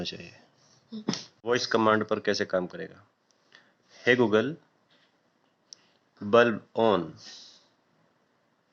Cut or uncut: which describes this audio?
cut